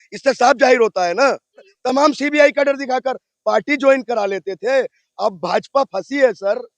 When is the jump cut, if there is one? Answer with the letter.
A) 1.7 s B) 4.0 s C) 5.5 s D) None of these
A